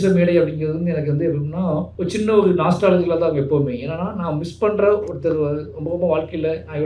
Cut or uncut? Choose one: cut